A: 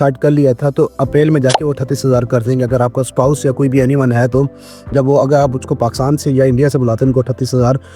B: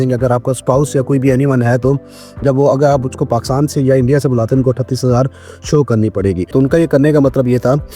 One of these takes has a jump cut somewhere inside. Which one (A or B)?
B